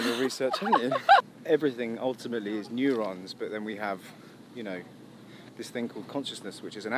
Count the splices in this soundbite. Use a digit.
1